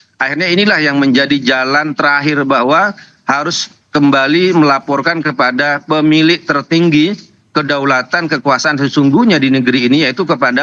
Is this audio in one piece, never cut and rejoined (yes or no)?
yes